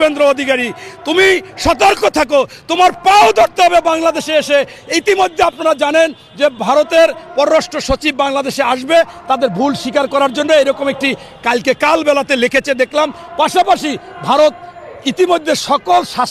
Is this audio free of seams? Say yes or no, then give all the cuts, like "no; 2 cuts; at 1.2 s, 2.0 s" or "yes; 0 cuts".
yes; 0 cuts